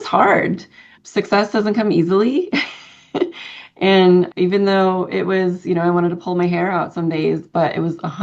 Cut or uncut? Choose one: cut